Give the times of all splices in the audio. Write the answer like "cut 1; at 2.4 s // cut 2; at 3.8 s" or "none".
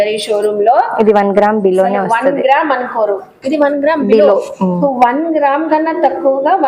cut 1; at 4.8 s